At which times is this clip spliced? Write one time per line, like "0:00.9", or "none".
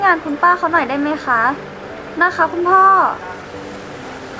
none